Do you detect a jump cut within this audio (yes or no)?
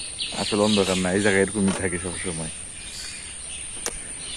no